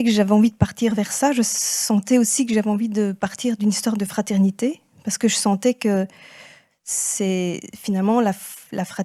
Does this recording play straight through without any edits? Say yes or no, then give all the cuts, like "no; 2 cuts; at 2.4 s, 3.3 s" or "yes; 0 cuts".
yes; 0 cuts